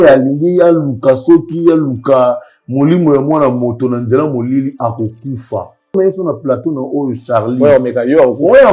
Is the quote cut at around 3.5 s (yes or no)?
no